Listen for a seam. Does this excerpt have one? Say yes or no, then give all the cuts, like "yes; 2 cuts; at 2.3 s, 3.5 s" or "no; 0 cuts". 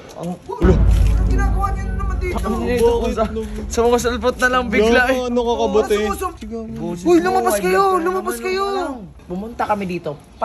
yes; 2 cuts; at 6.3 s, 9.2 s